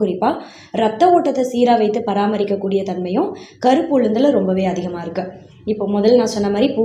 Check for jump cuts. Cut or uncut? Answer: uncut